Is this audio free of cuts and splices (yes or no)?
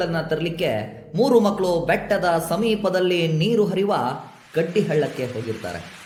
yes